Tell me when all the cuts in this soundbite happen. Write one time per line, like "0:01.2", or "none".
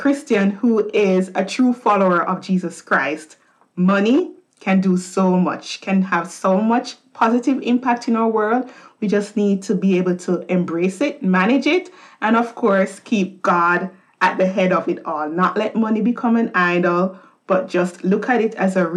none